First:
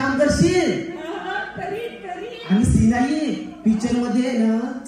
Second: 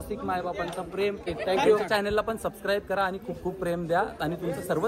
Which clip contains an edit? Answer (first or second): second